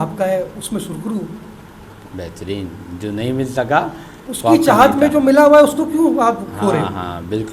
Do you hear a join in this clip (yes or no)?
no